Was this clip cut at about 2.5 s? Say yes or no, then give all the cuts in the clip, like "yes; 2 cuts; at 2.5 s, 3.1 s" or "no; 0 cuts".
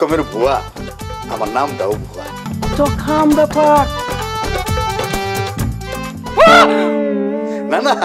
yes; 1 cut; at 2.5 s